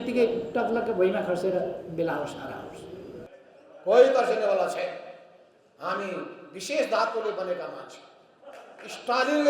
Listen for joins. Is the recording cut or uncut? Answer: cut